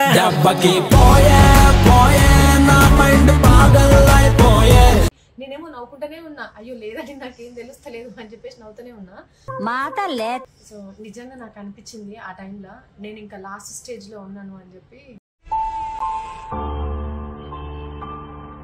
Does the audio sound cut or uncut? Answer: cut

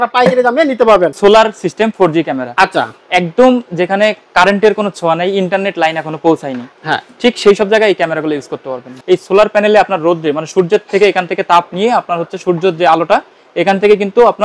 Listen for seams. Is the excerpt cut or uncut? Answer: cut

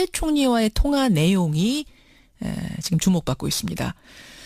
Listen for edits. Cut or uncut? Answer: uncut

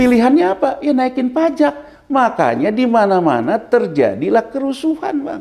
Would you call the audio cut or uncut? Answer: uncut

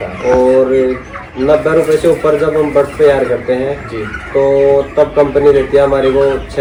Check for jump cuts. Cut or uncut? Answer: uncut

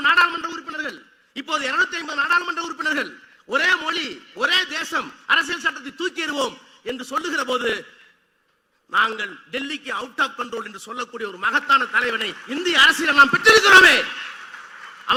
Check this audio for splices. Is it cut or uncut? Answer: uncut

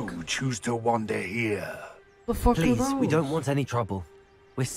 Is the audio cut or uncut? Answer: uncut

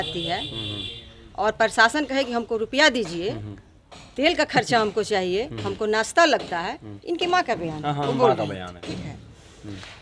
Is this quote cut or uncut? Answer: uncut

